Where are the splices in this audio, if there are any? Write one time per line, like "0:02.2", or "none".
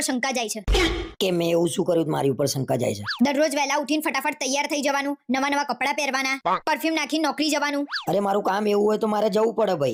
none

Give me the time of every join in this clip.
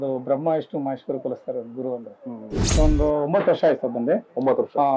0:02.7

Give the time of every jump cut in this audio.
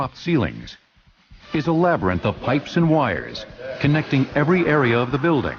0:02.9

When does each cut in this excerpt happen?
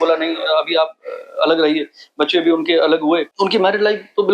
0:03.3

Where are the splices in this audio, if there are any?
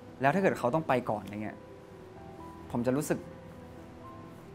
none

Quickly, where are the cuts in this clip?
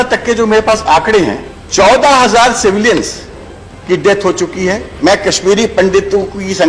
0:02.0
0:04.9

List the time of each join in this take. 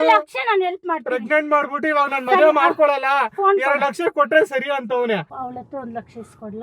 0:05.3

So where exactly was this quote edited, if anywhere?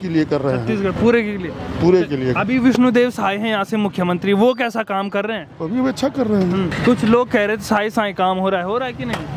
none

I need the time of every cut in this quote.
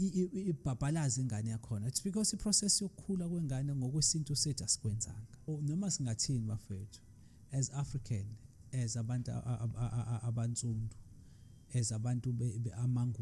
0:05.5

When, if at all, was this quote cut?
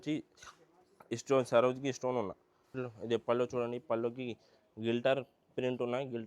0:02.8

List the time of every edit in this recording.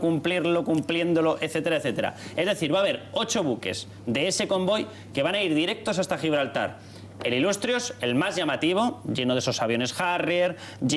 0:04.3

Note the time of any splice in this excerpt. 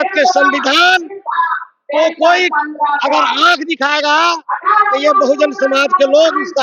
none

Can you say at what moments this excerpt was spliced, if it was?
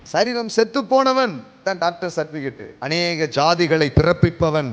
0:01.5
0:02.7

